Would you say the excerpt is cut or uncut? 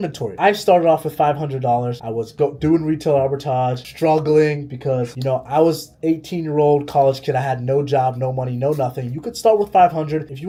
uncut